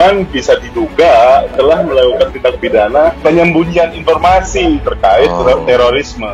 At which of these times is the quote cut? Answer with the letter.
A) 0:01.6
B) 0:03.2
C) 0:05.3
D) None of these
B